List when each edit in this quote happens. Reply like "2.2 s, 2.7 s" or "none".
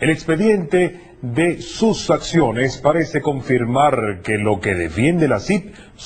3.4 s